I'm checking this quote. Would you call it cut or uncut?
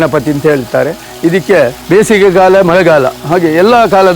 cut